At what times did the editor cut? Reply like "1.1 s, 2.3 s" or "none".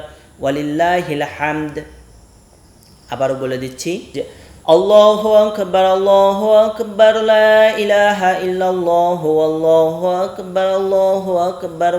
4.1 s